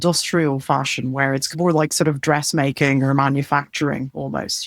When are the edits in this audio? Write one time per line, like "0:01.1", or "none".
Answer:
none